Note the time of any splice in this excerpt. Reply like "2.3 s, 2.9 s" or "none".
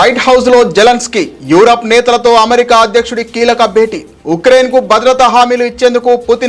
none